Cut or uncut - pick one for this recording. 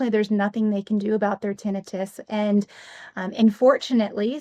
uncut